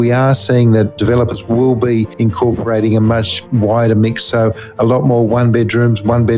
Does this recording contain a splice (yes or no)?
yes